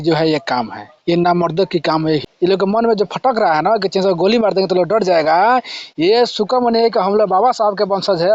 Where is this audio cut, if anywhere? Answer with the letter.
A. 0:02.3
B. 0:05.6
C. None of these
A